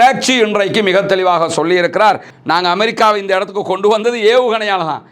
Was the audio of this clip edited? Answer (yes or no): yes